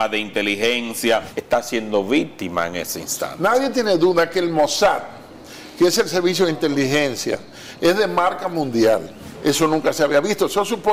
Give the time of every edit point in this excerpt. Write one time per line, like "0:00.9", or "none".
0:01.3
0:09.2